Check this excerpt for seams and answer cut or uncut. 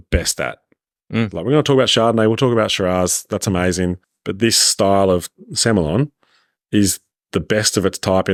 uncut